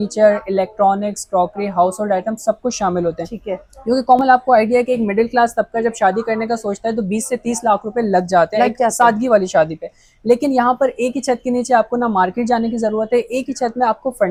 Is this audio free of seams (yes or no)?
yes